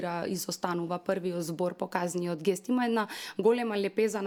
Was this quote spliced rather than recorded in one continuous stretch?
no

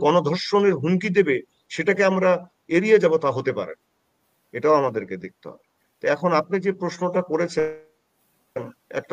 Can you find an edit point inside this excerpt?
no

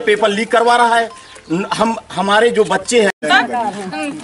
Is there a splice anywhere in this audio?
yes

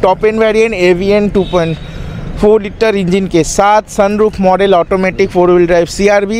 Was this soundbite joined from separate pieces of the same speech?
no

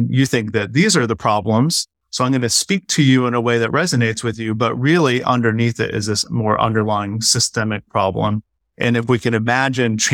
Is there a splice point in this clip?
no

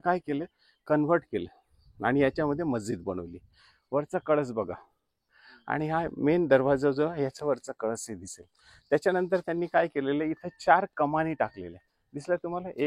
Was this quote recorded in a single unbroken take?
yes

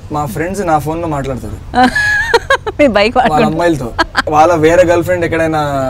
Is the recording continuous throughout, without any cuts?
no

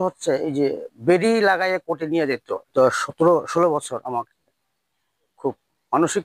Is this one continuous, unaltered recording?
no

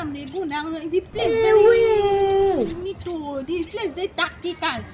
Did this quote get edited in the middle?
yes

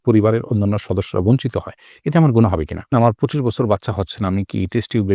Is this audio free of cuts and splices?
no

